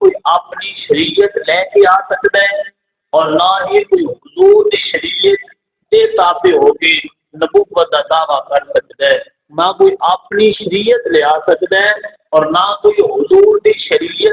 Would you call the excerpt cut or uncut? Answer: uncut